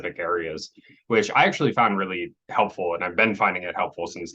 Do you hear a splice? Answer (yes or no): no